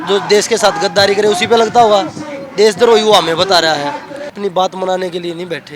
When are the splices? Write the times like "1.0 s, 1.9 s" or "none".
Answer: 4.3 s